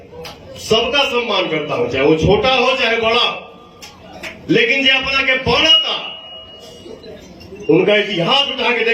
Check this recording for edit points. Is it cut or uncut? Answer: uncut